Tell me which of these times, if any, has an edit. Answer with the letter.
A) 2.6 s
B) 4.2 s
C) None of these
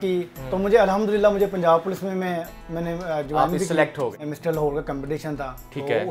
B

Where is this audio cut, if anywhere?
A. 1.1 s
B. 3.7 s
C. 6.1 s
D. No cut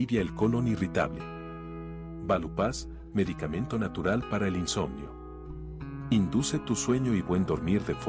B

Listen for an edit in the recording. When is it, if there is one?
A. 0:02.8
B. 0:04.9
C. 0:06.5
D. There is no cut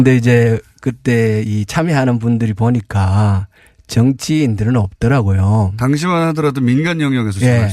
D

